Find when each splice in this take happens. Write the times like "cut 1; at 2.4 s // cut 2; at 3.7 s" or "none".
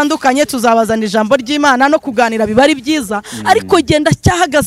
none